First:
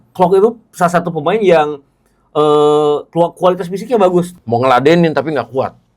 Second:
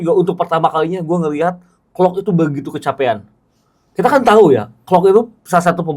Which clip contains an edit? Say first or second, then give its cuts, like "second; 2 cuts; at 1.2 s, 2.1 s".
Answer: first; 1 cut; at 4.3 s